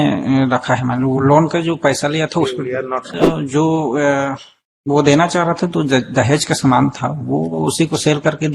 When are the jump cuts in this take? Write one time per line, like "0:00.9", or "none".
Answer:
0:03.1